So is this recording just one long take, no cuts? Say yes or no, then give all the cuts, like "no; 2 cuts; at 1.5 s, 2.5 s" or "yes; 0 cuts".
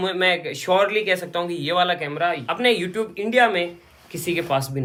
yes; 0 cuts